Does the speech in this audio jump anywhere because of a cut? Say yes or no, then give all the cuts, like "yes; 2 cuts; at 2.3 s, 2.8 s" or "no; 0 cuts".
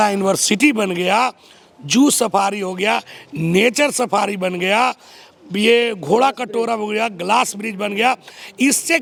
no; 0 cuts